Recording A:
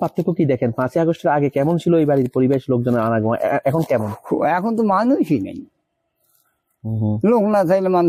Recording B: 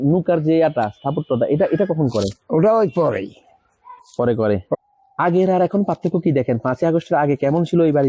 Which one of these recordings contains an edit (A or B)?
B